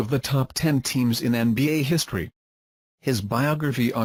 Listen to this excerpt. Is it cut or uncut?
uncut